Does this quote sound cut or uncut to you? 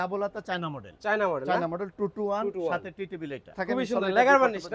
cut